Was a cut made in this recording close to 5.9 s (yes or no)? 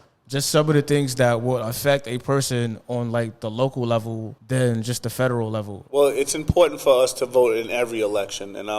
no